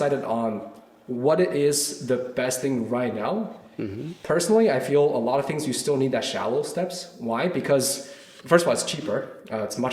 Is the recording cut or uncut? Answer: uncut